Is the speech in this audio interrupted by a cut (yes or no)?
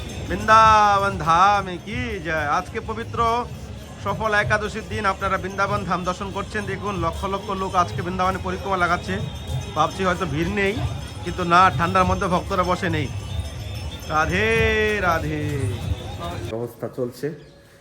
yes